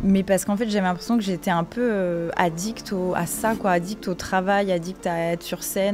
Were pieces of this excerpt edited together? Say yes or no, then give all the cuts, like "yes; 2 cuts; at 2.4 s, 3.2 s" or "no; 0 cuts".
no; 0 cuts